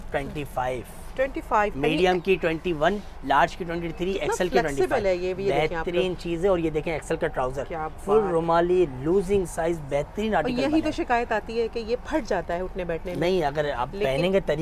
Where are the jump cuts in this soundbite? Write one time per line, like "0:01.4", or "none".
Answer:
none